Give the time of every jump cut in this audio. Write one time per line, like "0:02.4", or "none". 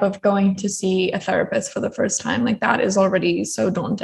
none